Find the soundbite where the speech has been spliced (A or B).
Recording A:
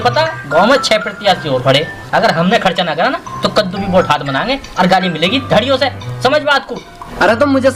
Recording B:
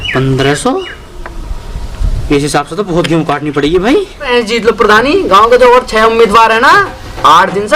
B